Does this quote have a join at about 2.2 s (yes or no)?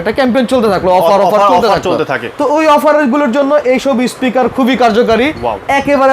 yes